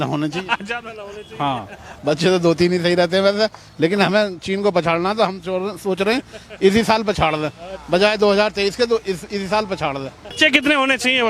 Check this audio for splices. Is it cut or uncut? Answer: cut